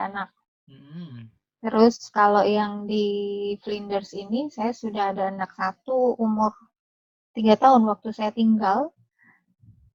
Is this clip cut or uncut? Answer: uncut